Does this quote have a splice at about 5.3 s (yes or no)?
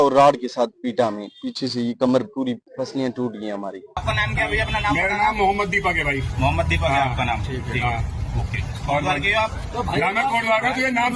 no